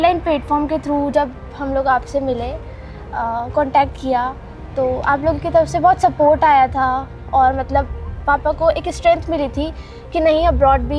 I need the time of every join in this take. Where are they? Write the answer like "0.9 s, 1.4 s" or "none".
none